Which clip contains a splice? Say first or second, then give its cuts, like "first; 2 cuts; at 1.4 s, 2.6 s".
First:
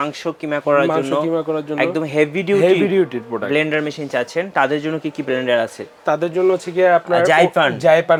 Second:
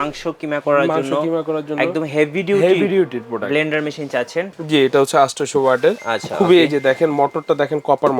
second; 1 cut; at 4.5 s